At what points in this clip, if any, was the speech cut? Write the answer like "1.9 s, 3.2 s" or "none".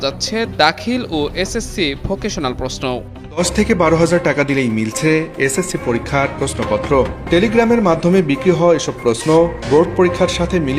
3.4 s

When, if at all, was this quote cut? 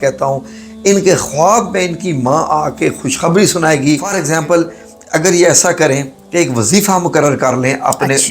4.1 s

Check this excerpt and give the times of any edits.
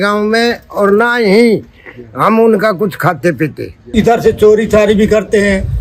3.9 s

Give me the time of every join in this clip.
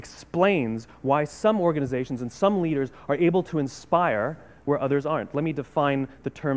none

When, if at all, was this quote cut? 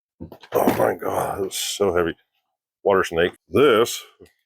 3.4 s

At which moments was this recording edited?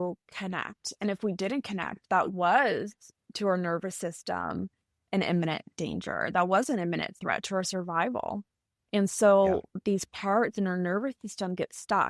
none

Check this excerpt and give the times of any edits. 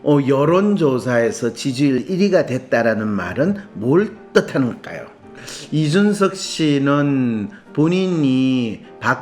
5.3 s

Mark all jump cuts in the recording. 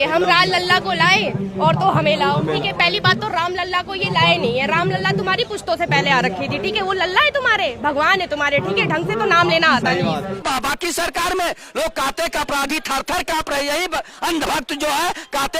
10.4 s

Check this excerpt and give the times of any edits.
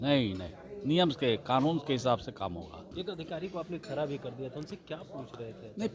2.8 s

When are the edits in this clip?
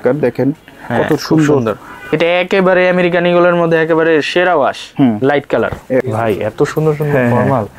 2.1 s, 6.1 s

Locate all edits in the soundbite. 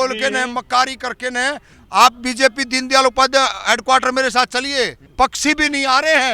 1.7 s, 5.0 s

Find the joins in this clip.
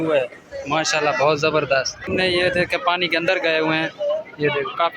2.1 s

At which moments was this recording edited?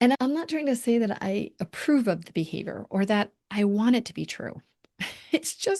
none

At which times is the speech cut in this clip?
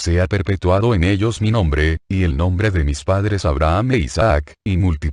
none

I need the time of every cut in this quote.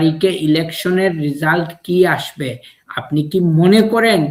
none

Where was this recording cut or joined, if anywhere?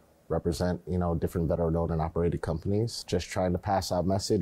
3.0 s

